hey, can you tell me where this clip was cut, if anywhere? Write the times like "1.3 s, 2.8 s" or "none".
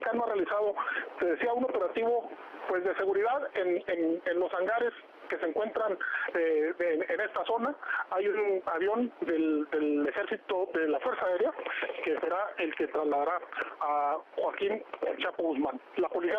7.7 s

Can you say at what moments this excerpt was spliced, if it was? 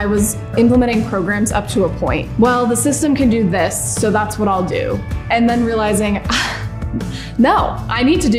none

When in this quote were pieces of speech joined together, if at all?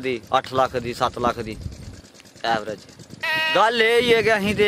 3.1 s

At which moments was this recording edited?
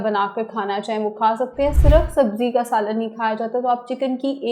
1.7 s

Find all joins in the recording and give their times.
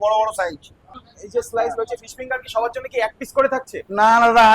1.0 s

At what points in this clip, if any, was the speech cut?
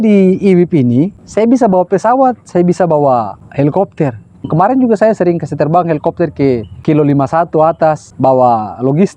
1.2 s, 3.4 s, 4.4 s, 6.7 s, 8.1 s

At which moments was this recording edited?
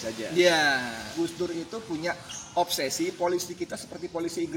1.1 s

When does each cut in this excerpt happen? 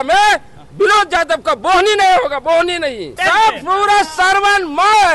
3.1 s

